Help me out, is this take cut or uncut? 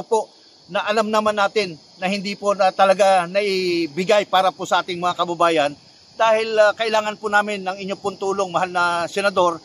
uncut